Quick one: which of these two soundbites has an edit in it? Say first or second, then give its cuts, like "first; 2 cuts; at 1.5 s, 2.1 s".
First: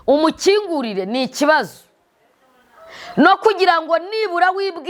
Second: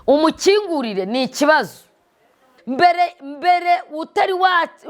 second; 1 cut; at 2.6 s